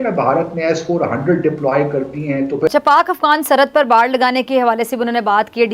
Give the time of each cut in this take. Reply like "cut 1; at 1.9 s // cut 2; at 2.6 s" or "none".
cut 1; at 2.7 s